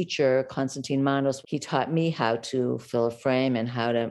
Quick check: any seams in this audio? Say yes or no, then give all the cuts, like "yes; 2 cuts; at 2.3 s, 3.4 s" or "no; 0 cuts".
yes; 1 cut; at 1.4 s